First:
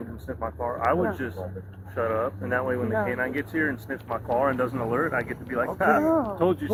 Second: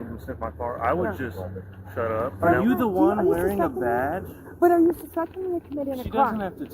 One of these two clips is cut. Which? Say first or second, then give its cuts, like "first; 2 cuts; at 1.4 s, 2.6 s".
second; 1 cut; at 2.3 s